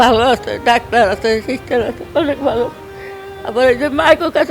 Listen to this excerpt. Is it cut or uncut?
uncut